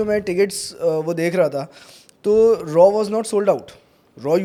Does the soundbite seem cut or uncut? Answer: uncut